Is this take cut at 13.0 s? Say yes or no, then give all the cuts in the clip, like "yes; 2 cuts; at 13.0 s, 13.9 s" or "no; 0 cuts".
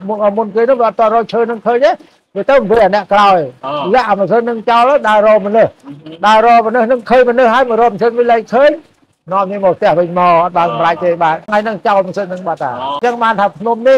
yes; 2 cuts; at 11.5 s, 13.0 s